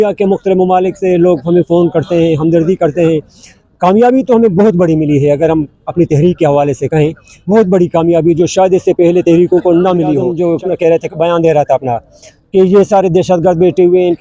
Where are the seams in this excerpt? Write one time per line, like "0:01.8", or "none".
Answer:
0:10.3